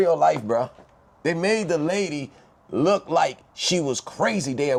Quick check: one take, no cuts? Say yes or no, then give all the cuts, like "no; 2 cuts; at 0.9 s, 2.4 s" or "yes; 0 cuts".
yes; 0 cuts